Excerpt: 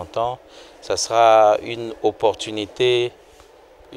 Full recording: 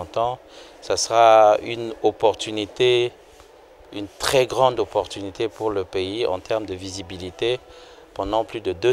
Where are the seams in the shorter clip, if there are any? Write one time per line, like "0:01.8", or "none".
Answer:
none